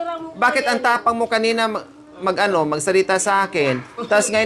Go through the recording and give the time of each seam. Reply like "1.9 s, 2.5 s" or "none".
none